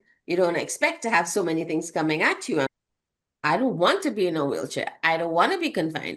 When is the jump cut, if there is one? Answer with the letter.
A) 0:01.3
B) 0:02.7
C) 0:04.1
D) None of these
B